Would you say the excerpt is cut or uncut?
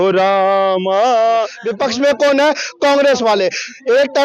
cut